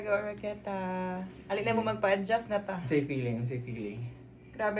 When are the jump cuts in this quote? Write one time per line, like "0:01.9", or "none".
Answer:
0:01.4

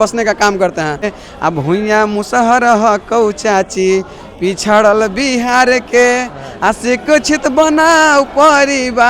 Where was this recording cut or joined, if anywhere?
0:01.0

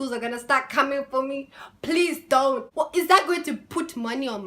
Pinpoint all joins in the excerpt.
0:02.7

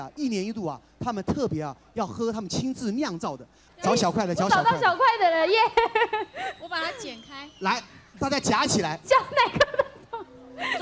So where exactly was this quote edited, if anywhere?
0:03.5

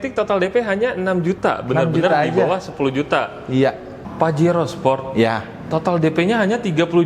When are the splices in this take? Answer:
0:04.1

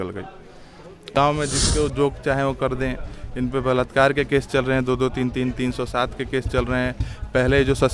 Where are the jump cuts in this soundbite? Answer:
0:01.1

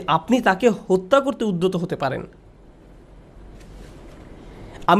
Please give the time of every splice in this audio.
none

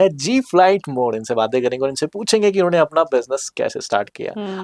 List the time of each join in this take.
none

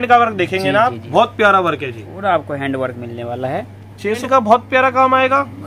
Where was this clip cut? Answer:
0:04.2

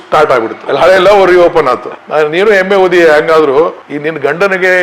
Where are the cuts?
0:02.1

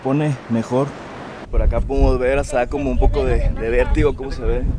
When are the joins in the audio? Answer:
0:01.1

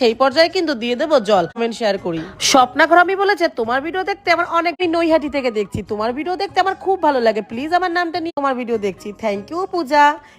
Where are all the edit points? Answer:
0:01.6
0:04.8
0:08.3

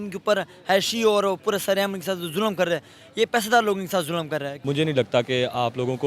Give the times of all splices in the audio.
0:04.5

